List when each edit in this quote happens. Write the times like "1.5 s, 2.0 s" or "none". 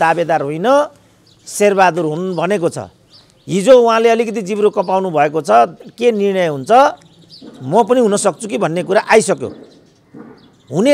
none